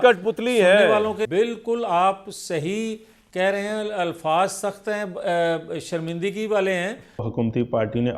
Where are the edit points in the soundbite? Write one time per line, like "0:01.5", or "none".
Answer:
0:01.2
0:07.3